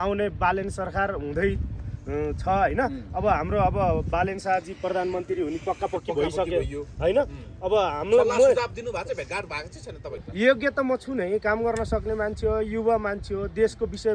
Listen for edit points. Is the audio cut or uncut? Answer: cut